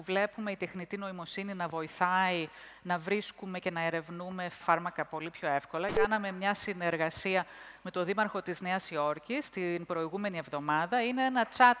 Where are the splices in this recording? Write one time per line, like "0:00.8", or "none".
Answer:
0:04.6
0:06.1